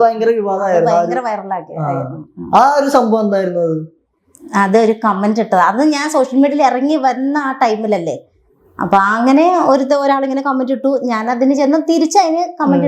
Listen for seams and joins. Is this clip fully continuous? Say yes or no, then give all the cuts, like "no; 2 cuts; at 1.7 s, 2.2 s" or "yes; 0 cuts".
yes; 0 cuts